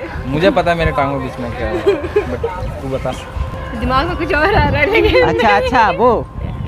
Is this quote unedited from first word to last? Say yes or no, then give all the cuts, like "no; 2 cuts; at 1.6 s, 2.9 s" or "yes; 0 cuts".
no; 1 cut; at 3.5 s